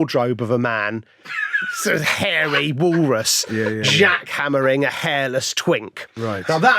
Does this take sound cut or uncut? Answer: uncut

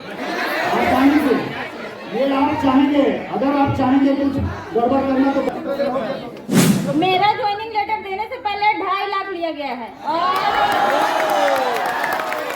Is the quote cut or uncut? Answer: cut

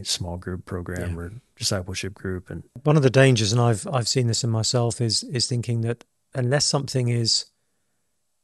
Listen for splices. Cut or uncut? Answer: cut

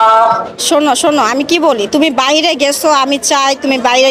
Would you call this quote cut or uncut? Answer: uncut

